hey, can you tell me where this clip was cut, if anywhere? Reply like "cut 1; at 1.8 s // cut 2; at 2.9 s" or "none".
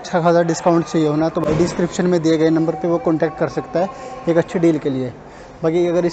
none